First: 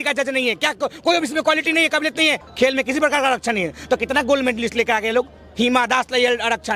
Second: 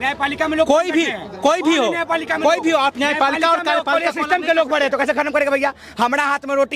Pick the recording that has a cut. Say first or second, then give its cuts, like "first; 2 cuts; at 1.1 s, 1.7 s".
first; 1 cut; at 2.4 s